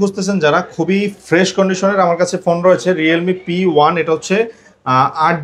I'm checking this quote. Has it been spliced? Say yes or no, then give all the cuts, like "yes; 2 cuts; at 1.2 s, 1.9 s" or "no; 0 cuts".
no; 0 cuts